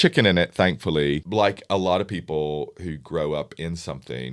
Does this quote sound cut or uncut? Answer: cut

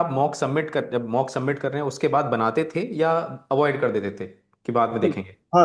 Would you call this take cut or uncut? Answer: uncut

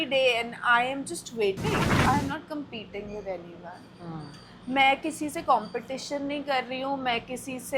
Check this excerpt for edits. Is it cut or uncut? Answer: cut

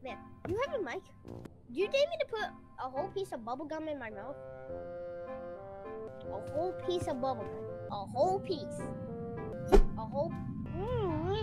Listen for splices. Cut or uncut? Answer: cut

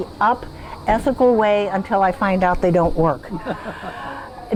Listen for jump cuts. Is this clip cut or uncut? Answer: uncut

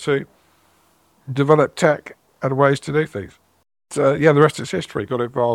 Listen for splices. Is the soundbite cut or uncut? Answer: cut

